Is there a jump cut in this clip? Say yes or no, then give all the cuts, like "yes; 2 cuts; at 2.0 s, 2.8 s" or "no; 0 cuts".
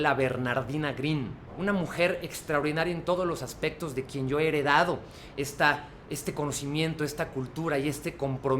yes; 1 cut; at 1.4 s